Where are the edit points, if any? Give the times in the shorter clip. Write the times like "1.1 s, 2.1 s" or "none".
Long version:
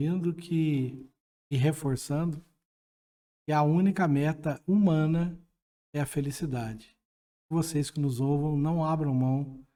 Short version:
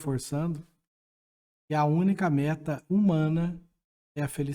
none